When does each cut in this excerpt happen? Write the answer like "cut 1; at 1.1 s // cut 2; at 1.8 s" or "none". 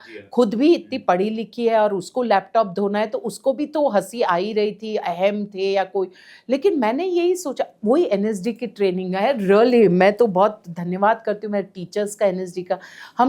none